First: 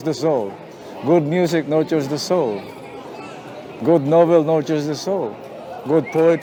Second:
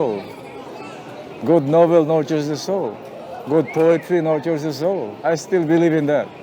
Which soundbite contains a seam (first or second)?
second